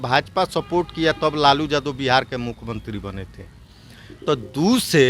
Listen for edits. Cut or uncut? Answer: uncut